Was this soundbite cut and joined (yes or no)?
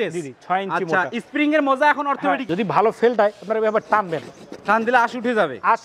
yes